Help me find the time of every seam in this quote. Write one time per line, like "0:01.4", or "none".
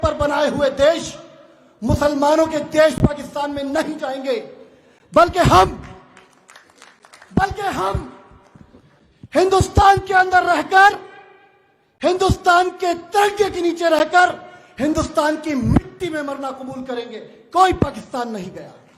none